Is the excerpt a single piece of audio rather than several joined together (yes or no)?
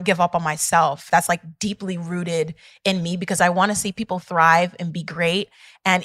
no